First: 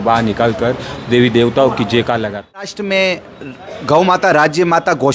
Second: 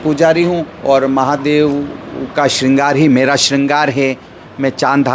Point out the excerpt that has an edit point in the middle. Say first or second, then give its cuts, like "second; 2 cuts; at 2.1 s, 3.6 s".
first; 1 cut; at 2.7 s